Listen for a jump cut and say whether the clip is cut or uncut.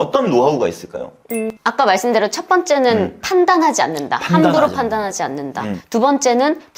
uncut